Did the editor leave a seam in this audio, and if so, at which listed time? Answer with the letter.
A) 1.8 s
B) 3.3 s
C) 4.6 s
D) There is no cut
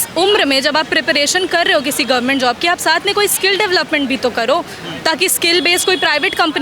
D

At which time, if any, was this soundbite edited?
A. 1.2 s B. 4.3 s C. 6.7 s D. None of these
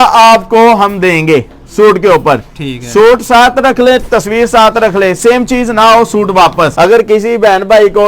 C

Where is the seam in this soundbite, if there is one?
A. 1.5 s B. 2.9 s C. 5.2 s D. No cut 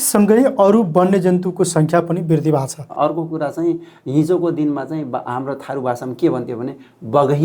B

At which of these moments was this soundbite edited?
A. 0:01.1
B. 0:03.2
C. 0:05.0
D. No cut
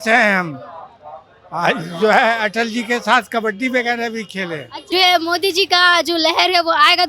C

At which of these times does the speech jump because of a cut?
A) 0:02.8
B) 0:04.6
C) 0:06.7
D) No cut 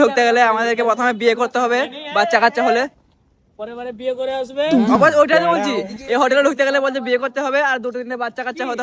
D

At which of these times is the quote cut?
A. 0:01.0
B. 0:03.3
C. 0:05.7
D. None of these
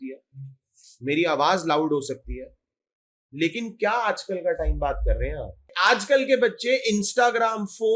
C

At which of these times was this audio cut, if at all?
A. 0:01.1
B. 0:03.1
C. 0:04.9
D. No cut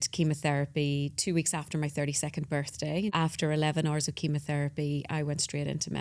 B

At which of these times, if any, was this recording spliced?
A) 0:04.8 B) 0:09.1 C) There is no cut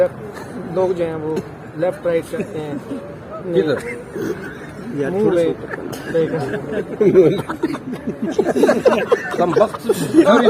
C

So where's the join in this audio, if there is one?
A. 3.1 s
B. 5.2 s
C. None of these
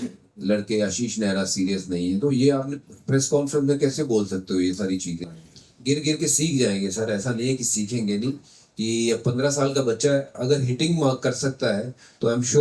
B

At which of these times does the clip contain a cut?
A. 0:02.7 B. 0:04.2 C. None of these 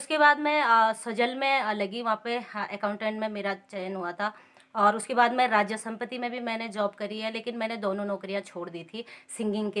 C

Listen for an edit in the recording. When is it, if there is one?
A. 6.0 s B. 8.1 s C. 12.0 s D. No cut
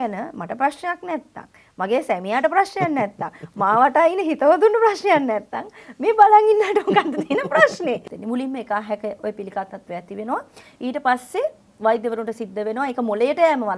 B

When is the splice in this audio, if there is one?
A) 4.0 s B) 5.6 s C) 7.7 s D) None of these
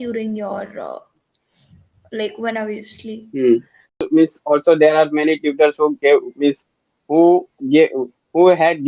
A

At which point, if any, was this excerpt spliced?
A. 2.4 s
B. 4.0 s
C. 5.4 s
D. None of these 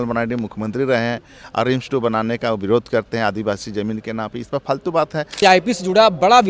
C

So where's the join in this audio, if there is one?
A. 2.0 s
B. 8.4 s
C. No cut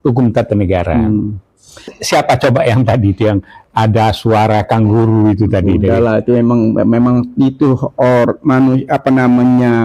A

